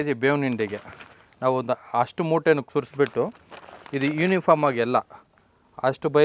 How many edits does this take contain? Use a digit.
1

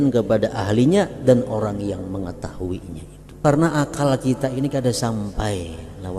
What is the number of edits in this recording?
1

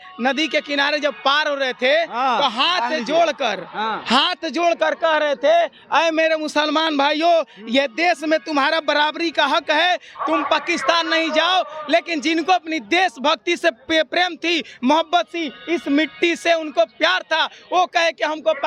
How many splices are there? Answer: 0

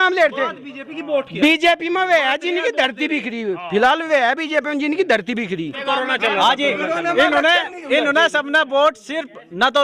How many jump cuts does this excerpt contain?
1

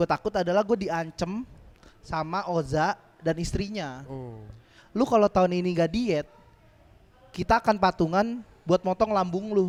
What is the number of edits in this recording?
0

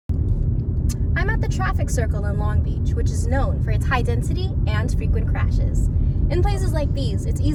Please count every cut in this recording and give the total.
0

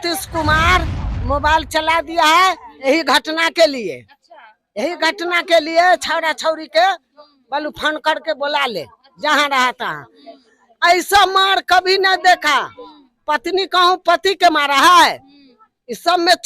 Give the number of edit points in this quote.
1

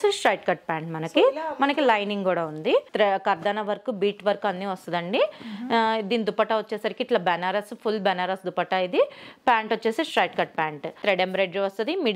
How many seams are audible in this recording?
2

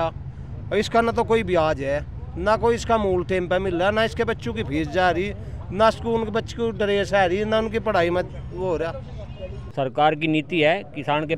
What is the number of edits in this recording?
1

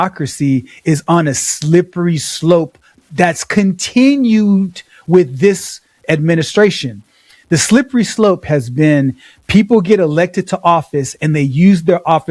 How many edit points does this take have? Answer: 0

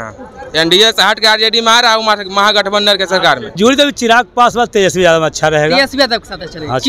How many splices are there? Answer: 1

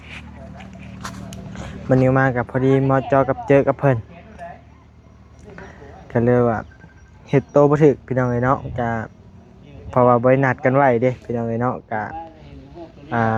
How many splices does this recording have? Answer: 0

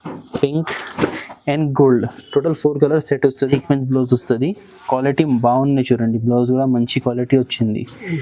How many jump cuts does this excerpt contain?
1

